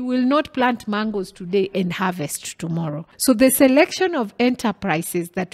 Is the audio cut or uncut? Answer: cut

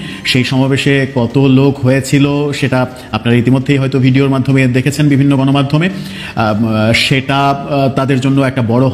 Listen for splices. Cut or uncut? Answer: uncut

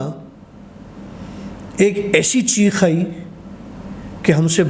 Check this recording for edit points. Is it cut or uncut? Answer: uncut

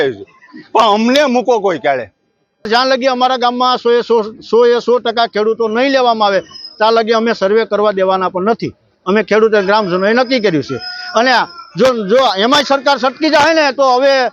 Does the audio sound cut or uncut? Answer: cut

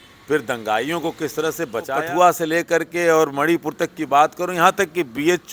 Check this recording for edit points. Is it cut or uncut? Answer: cut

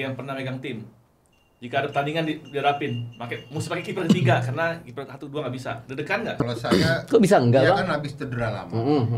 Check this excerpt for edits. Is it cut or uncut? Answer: cut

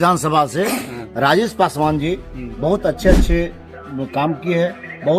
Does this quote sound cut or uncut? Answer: uncut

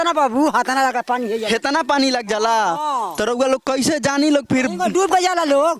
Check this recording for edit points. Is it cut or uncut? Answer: uncut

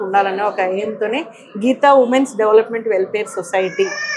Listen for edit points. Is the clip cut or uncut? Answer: uncut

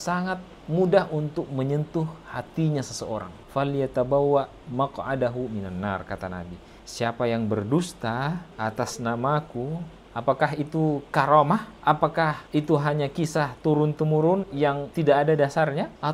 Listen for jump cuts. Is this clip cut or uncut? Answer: cut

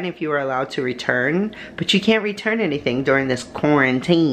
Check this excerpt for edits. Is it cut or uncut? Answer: uncut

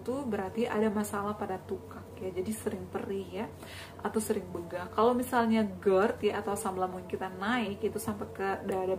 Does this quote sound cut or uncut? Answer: uncut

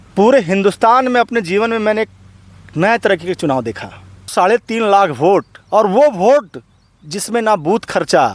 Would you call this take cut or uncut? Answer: cut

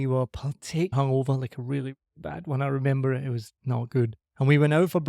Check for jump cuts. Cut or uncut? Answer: cut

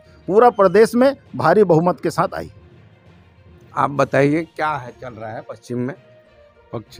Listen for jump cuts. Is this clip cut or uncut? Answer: uncut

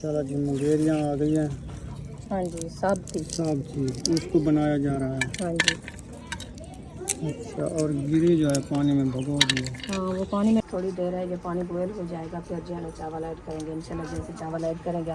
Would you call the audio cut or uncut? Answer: cut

